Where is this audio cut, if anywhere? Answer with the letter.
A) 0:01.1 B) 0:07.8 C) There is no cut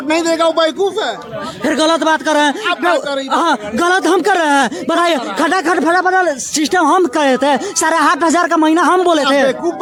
C